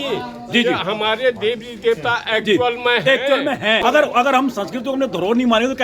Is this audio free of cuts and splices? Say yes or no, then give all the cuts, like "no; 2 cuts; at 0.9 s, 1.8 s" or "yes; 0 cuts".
no; 1 cut; at 3.8 s